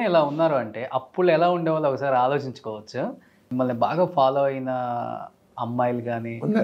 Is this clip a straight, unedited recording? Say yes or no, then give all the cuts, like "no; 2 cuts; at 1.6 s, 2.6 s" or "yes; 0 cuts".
no; 1 cut; at 3.4 s